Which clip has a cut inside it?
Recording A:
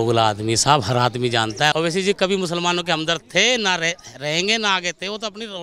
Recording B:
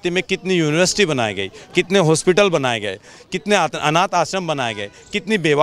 A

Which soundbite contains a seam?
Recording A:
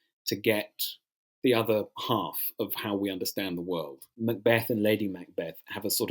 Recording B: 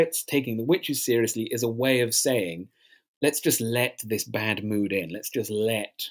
A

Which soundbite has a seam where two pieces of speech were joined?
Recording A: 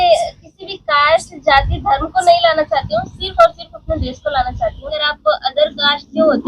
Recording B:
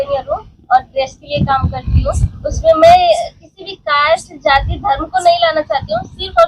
A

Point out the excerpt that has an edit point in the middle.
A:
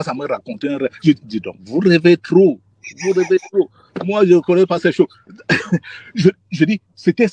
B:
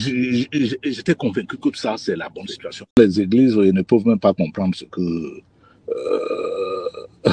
B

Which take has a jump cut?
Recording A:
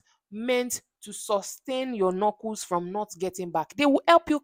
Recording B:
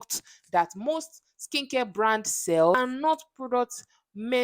B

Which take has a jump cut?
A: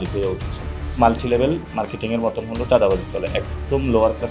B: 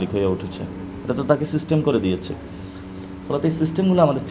A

